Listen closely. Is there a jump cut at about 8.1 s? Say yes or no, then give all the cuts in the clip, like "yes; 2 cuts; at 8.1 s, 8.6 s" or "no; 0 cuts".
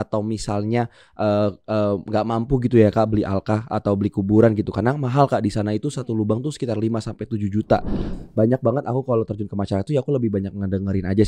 yes; 1 cut; at 8.1 s